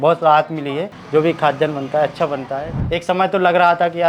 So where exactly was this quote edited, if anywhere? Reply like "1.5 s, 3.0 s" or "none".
0.9 s, 2.7 s